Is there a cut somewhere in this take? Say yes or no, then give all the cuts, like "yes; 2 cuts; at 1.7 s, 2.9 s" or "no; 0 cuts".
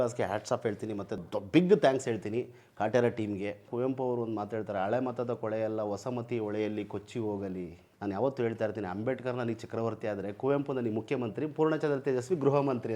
yes; 3 cuts; at 1.3 s, 3.7 s, 7.9 s